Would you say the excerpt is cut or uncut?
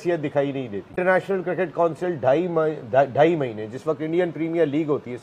cut